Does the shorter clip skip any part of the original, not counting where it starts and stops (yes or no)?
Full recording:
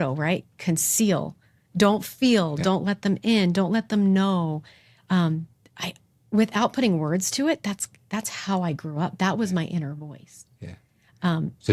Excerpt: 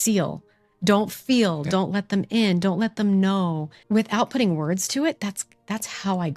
yes